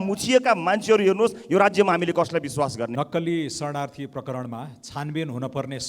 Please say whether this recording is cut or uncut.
cut